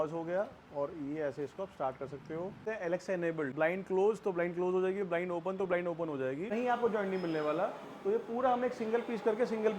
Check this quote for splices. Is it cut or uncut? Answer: cut